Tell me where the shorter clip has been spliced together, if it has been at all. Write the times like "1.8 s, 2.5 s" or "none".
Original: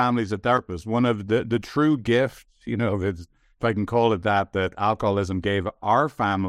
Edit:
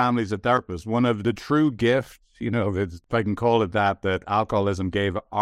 1.2 s, 3.0 s